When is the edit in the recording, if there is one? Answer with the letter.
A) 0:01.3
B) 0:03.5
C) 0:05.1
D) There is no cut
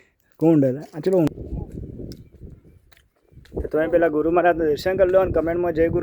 A